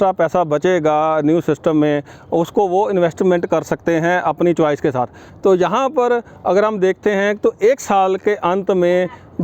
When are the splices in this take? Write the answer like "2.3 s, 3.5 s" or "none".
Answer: 5.2 s